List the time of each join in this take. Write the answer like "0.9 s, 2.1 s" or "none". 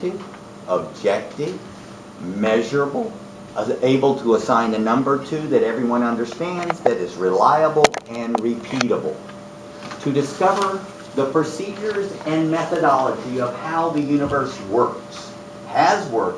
12.7 s